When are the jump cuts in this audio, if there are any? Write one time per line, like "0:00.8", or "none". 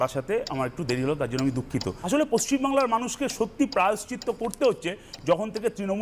0:01.9